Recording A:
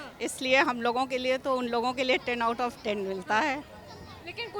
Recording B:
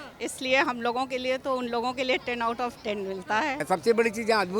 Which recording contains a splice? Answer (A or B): B